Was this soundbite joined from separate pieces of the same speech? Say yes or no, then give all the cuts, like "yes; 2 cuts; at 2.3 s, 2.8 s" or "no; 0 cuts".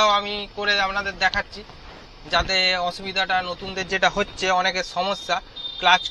no; 0 cuts